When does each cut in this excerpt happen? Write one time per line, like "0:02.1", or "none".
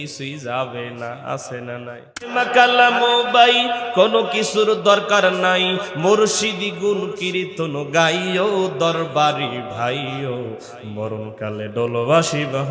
0:02.4